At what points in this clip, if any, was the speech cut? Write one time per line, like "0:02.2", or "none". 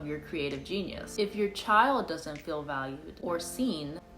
0:01.0